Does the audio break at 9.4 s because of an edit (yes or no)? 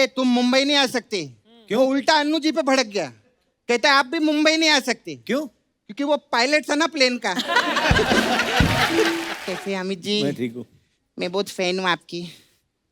yes